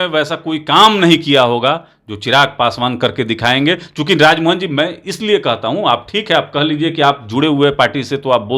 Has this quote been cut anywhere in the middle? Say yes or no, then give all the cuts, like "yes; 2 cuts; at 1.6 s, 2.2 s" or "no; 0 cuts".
no; 0 cuts